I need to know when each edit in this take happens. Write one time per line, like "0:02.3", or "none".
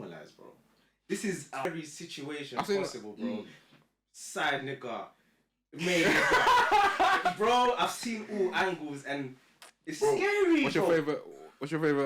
0:01.6